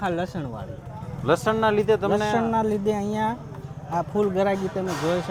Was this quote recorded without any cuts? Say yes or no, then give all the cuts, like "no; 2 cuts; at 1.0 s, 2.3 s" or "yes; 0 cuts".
yes; 0 cuts